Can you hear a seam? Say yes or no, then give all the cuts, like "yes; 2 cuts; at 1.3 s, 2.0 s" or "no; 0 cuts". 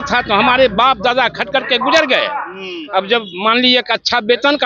no; 0 cuts